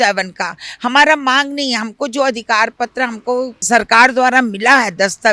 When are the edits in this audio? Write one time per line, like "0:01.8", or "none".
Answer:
0:03.6